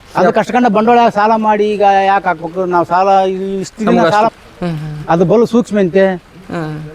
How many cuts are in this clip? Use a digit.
1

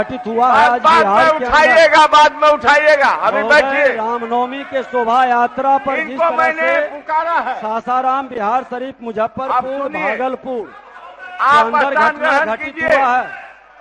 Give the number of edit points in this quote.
0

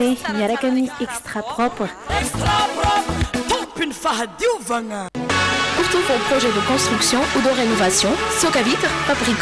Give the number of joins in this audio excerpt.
0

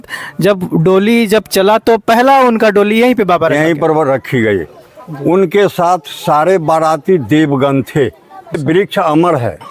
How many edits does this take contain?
1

